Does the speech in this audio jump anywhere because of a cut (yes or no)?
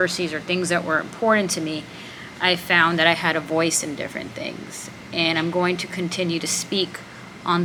no